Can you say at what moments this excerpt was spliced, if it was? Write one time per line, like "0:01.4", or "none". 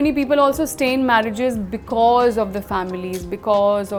none